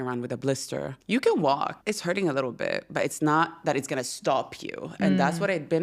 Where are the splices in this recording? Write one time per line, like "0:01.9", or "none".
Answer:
0:00.9
0:01.8